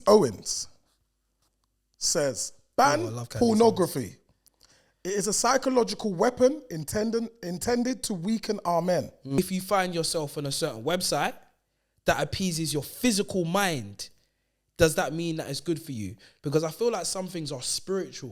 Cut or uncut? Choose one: cut